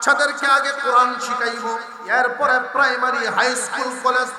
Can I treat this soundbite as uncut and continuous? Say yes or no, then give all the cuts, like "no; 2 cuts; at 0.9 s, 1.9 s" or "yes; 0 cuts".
no; 1 cut; at 1.9 s